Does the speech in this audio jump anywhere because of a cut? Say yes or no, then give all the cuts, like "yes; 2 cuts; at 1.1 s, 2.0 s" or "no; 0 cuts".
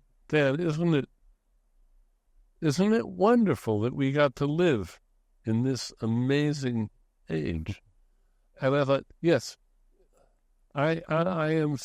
no; 0 cuts